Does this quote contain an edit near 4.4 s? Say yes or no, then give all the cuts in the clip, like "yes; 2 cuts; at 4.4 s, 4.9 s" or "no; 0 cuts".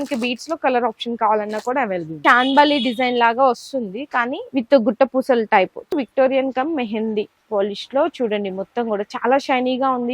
yes; 3 cuts; at 2.1 s, 4.4 s, 5.9 s